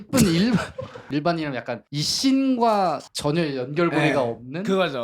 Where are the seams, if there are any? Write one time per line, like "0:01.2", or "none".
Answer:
0:00.9